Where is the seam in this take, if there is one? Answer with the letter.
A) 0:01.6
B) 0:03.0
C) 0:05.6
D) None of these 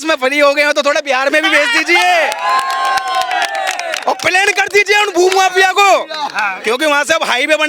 D